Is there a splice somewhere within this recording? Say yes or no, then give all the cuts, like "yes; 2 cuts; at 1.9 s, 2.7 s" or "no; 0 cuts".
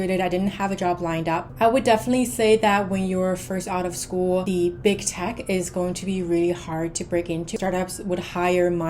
yes; 3 cuts; at 1.5 s, 4.4 s, 7.5 s